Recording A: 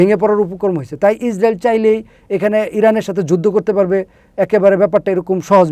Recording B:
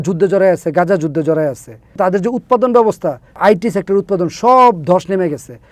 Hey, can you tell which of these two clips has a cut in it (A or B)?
B